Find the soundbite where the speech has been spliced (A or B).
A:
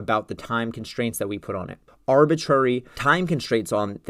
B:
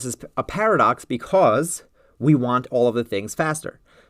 A